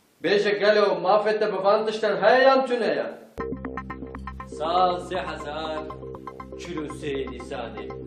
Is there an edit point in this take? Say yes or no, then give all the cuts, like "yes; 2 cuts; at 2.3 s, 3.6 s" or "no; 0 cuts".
yes; 1 cut; at 2.9 s